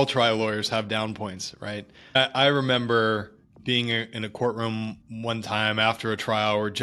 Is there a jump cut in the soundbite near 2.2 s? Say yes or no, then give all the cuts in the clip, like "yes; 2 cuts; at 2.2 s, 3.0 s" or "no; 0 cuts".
yes; 1 cut; at 2.2 s